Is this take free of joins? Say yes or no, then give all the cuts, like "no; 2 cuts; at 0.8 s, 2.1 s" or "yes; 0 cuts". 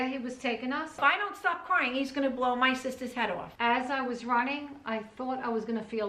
no; 2 cuts; at 1.0 s, 3.5 s